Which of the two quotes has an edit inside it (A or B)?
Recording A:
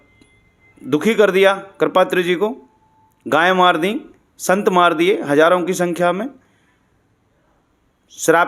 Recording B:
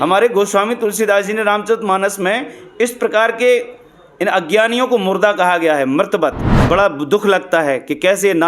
B